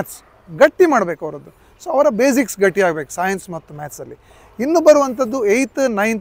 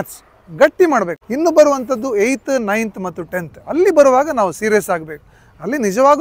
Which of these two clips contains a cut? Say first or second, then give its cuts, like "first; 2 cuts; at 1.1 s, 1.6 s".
second; 1 cut; at 1.2 s